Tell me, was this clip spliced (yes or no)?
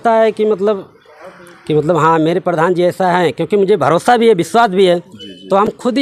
no